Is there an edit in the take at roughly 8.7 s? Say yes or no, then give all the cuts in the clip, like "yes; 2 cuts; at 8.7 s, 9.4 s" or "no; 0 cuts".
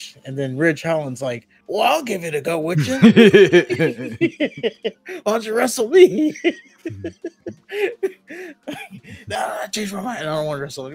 no; 2 cuts; at 1.5 s, 7.5 s